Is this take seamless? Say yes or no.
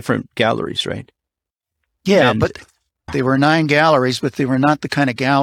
no